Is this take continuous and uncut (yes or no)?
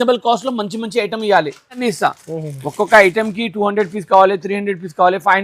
no